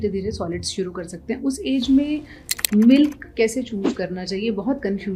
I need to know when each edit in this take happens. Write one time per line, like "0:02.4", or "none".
none

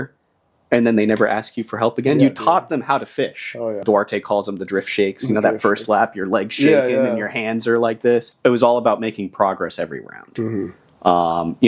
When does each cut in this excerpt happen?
0:03.8
0:08.3

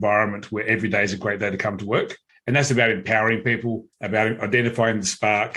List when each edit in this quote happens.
0:02.3
0:03.9

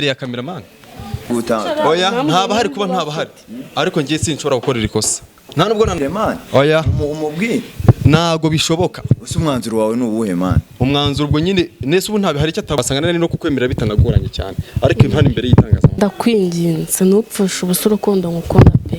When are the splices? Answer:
0:01.3
0:06.0
0:12.8
0:16.0

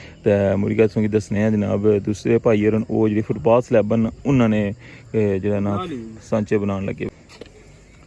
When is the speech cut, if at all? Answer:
0:07.1

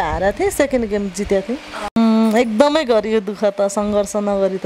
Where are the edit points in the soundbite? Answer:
0:02.0

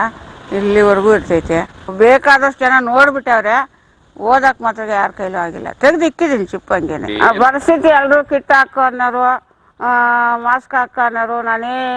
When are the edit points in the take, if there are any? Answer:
0:01.8
0:07.0

